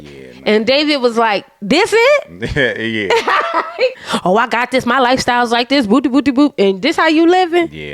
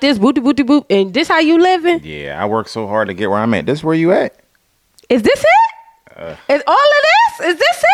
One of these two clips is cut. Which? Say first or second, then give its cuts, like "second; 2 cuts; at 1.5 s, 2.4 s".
first; 1 cut; at 4.1 s